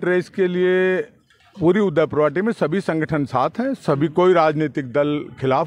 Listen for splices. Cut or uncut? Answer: uncut